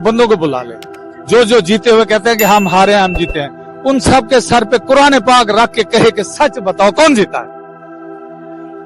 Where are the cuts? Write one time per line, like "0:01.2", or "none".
none